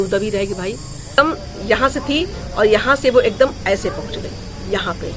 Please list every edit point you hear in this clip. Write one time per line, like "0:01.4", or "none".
0:01.2